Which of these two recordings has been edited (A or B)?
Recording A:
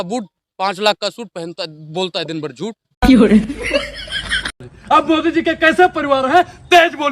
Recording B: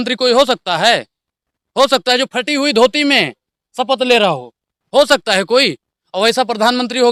A